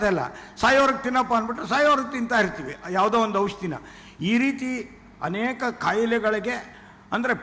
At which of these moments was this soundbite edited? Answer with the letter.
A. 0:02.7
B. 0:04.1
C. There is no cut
C